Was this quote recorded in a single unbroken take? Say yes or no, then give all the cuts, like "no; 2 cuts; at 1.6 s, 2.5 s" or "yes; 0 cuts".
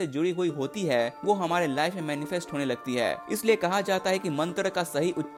yes; 0 cuts